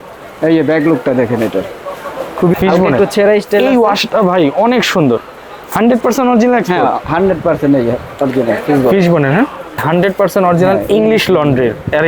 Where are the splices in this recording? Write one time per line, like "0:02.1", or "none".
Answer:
0:02.5
0:09.8